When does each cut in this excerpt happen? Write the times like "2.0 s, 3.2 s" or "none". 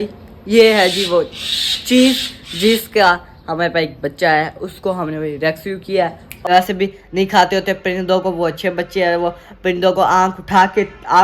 6.5 s